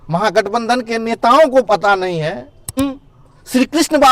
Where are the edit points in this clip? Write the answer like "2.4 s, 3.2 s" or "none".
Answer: 2.8 s